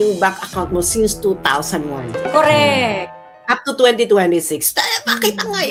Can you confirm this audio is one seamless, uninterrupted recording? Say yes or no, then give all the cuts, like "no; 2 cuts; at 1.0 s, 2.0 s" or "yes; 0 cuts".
yes; 0 cuts